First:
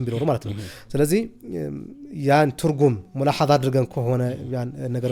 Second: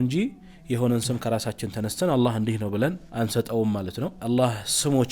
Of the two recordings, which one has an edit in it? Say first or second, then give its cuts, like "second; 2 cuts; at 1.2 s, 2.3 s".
second; 2 cuts; at 3.0 s, 4.2 s